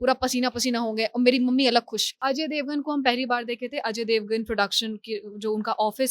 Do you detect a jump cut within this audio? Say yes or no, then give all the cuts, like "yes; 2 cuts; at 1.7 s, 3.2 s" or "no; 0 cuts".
yes; 1 cut; at 2.1 s